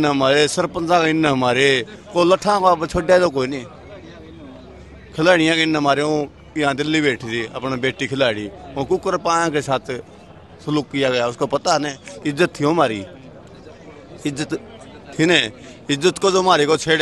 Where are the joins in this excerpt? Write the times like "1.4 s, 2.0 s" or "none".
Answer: none